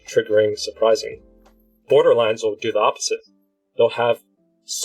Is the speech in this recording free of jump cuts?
no; 1 cut; at 1.9 s

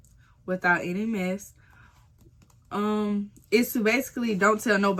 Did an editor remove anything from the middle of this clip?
no; 0 cuts

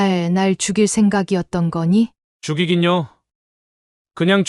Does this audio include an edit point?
yes; 1 cut; at 2.3 s

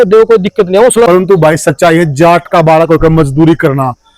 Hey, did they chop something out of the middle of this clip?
yes; 1 cut; at 1.1 s

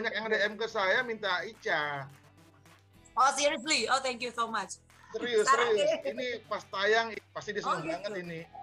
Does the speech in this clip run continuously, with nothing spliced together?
no; 1 cut; at 7.1 s

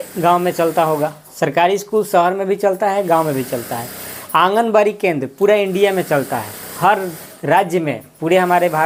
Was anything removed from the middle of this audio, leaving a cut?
no; 0 cuts

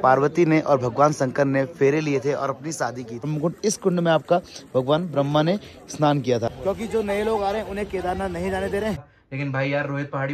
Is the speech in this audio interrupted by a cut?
yes; 3 cuts; at 3.3 s, 6.6 s, 9.1 s

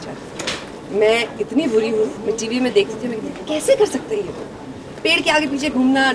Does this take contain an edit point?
yes; 1 cut; at 2.2 s

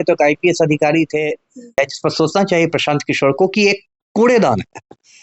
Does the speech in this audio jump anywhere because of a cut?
yes; 1 cut; at 1.7 s

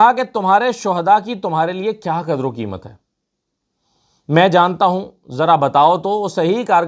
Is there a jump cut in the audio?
no; 0 cuts

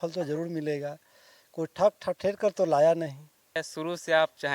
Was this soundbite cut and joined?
yes; 1 cut; at 3.6 s

